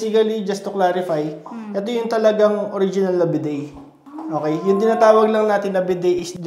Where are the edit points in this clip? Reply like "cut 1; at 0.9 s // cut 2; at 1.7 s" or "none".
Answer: none

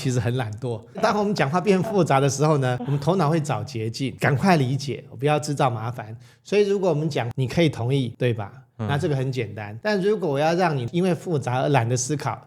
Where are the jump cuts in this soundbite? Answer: cut 1; at 1.0 s // cut 2; at 2.8 s // cut 3; at 4.1 s // cut 4; at 7.3 s // cut 5; at 8.1 s // cut 6; at 9.6 s // cut 7; at 10.8 s

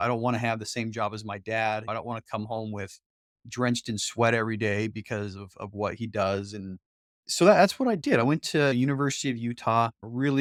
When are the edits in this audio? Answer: none

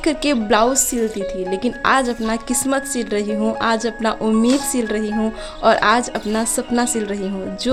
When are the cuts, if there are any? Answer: none

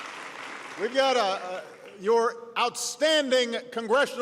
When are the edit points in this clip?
cut 1; at 2.4 s

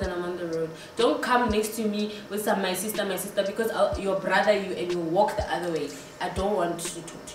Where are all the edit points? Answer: none

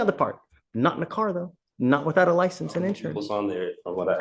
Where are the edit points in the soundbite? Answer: none

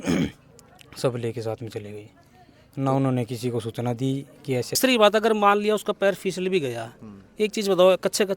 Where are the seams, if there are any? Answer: cut 1; at 4.8 s

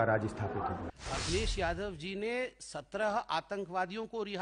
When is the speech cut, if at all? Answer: cut 1; at 0.9 s

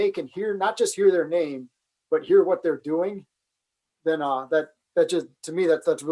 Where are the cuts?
none

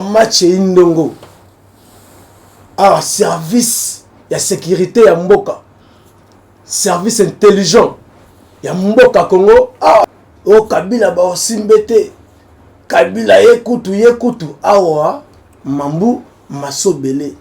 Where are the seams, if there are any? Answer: cut 1; at 10.0 s

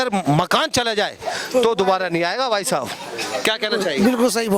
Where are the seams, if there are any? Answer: none

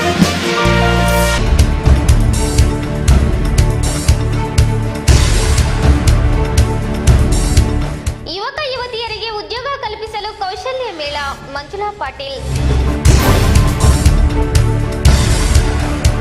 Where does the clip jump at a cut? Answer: cut 1; at 1.0 s

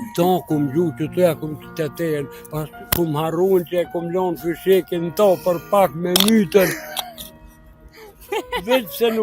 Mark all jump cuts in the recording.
none

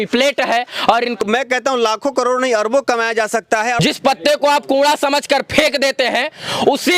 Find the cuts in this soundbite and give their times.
cut 1; at 1.2 s // cut 2; at 3.8 s

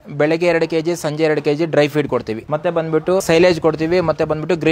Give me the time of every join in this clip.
cut 1; at 2.4 s // cut 2; at 3.2 s

